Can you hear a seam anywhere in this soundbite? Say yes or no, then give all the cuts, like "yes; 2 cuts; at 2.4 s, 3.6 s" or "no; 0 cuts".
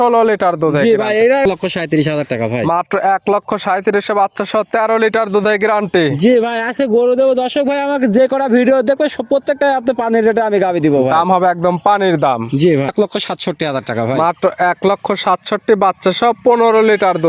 yes; 2 cuts; at 1.4 s, 12.9 s